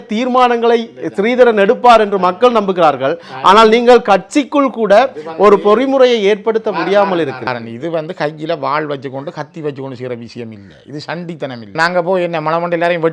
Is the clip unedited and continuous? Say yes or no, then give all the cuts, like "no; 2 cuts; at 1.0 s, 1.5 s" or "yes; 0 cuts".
no; 1 cut; at 11.7 s